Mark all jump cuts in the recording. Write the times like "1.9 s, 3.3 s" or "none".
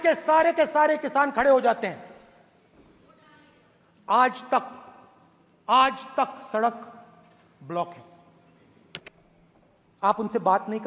none